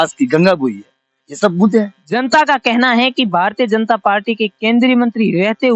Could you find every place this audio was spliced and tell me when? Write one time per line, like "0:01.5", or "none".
0:02.0